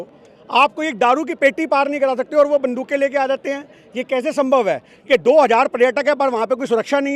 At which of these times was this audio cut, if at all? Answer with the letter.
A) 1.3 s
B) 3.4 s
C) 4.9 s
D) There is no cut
C